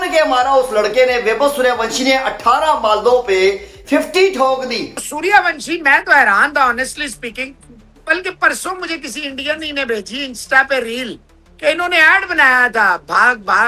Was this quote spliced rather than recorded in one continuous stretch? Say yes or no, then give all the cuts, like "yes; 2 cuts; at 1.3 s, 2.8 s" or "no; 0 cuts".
yes; 1 cut; at 5.0 s